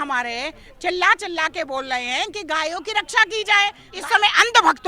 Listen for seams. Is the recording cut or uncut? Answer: cut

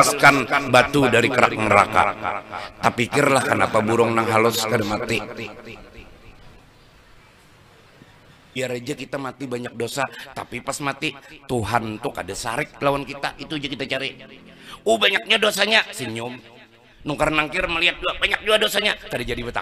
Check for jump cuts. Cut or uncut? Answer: cut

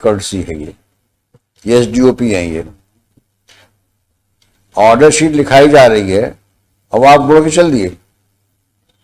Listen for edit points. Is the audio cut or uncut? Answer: uncut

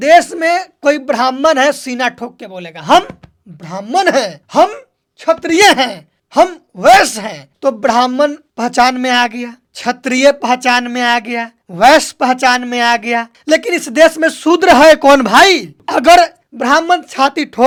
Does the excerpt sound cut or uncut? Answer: uncut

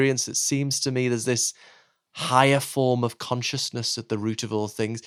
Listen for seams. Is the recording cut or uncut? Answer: uncut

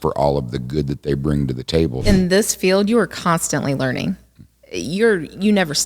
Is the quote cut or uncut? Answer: cut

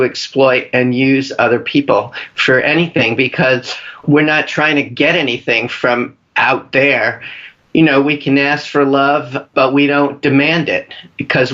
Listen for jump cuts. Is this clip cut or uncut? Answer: uncut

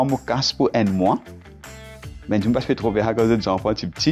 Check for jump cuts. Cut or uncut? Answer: uncut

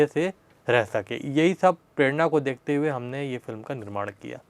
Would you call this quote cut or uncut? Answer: uncut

